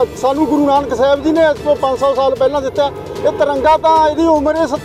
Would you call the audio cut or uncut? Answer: uncut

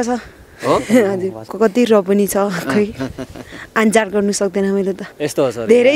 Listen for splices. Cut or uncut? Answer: cut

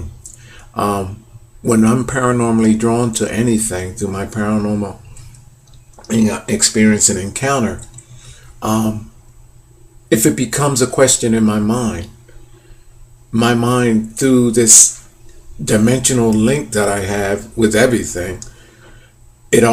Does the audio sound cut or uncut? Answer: cut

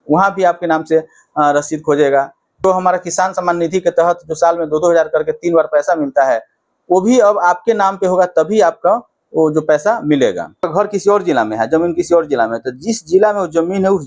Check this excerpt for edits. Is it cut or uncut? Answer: cut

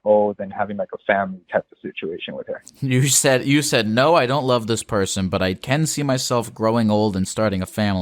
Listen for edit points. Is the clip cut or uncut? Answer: uncut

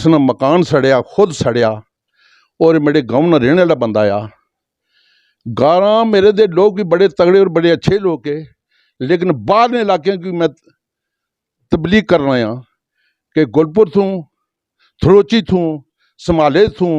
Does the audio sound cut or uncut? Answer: uncut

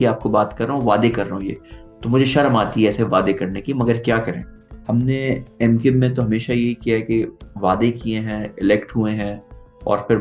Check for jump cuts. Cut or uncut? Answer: cut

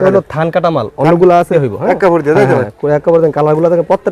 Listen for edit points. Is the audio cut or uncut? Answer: cut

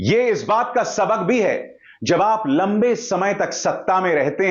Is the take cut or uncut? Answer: uncut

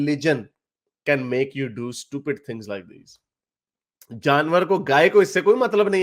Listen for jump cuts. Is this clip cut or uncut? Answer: uncut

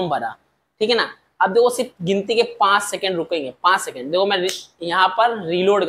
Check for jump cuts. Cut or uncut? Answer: uncut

